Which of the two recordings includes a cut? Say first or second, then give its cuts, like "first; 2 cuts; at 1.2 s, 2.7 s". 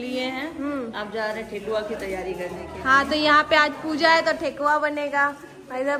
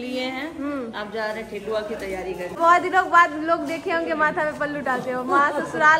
second; 1 cut; at 2.6 s